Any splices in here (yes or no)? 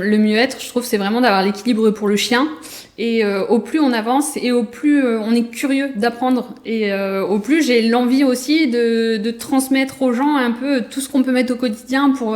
no